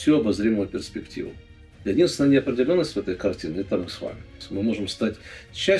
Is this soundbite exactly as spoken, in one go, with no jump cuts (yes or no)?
no